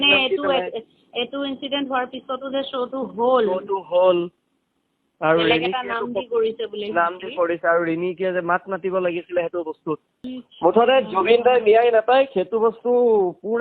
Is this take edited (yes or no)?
yes